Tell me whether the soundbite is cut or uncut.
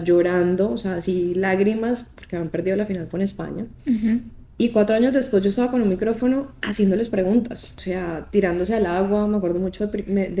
cut